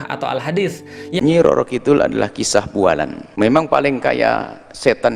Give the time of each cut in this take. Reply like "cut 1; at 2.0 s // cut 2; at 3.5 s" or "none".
cut 1; at 1.2 s